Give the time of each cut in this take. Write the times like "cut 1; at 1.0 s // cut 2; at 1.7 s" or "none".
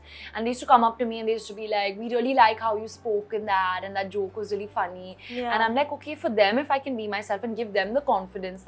none